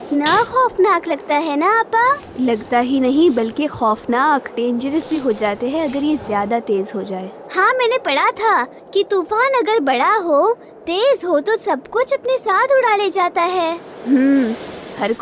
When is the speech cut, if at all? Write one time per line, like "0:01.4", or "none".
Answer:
none